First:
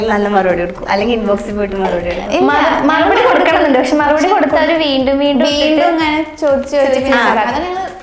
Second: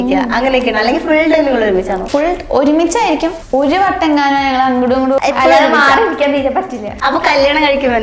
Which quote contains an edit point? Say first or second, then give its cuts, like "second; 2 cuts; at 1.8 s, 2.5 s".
second; 4 cuts; at 2.0 s, 3.4 s, 5.2 s, 6.8 s